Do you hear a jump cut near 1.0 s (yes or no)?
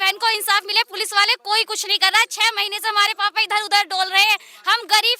no